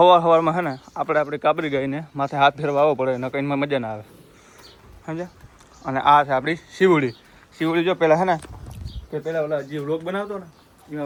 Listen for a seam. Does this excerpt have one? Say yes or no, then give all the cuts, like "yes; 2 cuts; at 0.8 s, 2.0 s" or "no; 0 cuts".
no; 0 cuts